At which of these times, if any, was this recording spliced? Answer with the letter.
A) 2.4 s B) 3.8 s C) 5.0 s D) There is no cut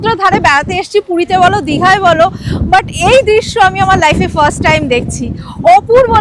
D